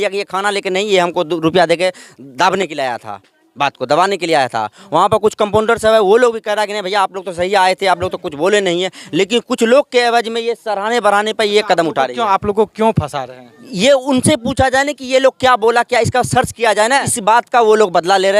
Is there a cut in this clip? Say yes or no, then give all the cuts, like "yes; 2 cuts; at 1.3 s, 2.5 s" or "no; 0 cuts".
no; 0 cuts